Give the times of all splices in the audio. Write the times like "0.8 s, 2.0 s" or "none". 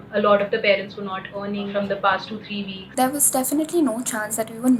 1.7 s, 2.8 s